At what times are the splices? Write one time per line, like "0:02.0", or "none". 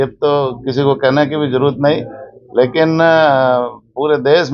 none